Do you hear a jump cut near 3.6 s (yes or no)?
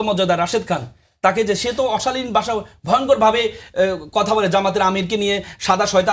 no